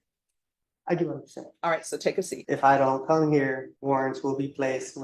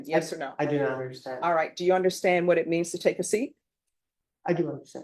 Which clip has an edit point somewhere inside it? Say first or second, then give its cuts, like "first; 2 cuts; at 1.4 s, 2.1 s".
first; 2 cuts; at 2.4 s, 3.7 s